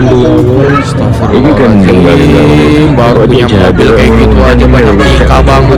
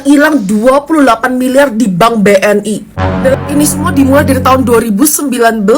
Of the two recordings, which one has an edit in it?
second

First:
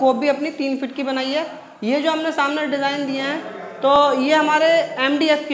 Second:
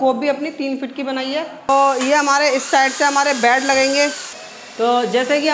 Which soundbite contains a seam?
second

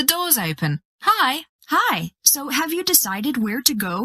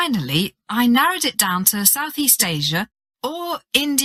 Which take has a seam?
first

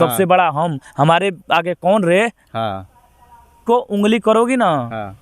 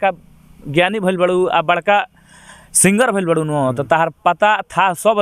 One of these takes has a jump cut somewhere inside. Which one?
first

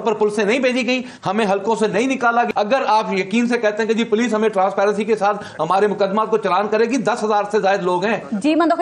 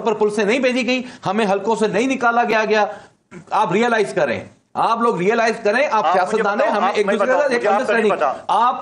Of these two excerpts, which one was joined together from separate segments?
first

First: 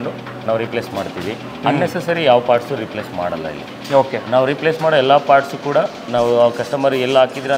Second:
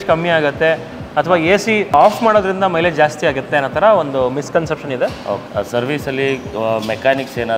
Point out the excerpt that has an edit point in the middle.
second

